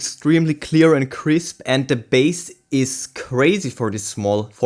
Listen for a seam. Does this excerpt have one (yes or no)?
no